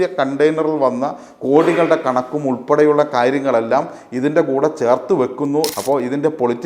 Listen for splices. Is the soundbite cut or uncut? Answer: cut